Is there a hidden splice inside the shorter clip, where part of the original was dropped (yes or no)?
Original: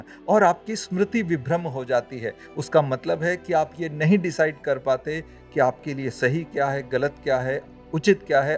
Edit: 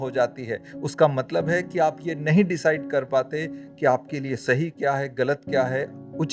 no